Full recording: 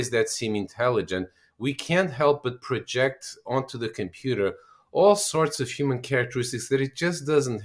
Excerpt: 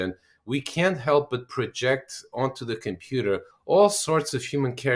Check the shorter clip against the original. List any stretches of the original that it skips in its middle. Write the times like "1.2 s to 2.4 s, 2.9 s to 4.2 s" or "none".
4.7 s to 4.8 s